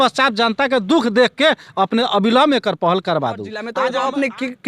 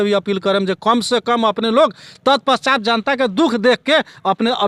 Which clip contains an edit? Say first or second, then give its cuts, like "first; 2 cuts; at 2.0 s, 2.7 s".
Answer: first; 1 cut; at 3.5 s